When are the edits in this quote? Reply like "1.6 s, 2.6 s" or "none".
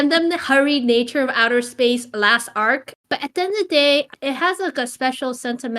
2.9 s, 4.1 s